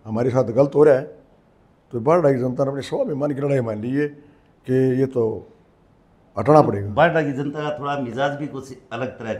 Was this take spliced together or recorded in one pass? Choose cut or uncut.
uncut